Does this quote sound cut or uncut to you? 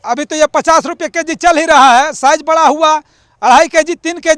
uncut